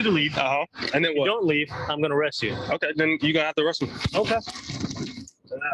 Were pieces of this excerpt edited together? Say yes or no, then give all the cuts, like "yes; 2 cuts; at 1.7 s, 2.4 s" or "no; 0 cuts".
no; 0 cuts